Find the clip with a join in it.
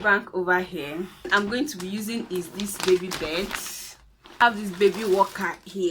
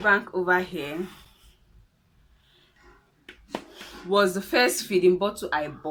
first; 2 cuts; at 1.3 s, 4.4 s

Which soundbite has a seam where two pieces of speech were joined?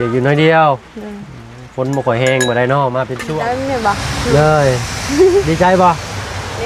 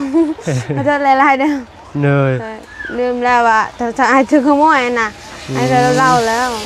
first; 1 cut; at 3.2 s

